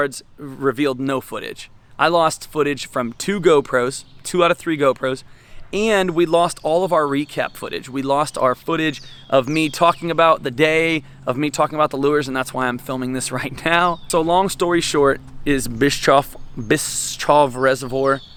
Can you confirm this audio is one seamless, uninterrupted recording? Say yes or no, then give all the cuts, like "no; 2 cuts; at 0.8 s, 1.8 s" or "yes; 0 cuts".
yes; 0 cuts